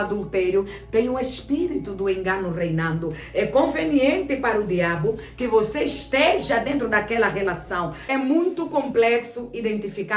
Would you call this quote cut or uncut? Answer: cut